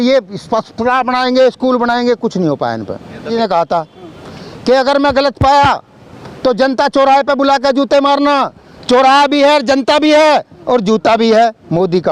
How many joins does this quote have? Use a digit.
1